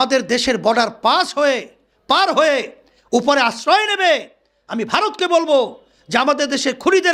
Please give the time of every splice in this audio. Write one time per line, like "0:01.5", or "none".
none